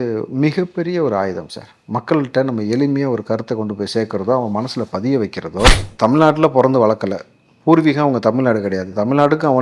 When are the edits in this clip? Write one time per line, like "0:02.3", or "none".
0:05.7